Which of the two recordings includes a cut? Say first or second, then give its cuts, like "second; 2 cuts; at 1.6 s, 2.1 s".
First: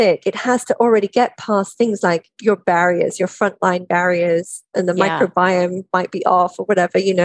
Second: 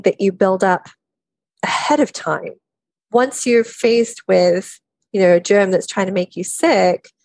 first; 1 cut; at 4.7 s